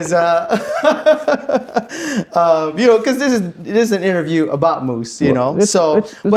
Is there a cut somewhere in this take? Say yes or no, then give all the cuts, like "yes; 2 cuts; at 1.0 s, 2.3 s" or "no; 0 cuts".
no; 0 cuts